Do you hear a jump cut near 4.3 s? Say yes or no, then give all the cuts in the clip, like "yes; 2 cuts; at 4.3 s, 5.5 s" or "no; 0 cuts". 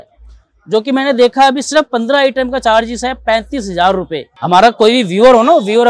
yes; 1 cut; at 4.3 s